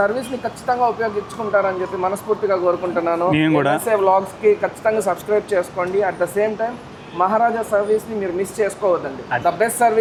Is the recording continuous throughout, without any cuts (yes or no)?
yes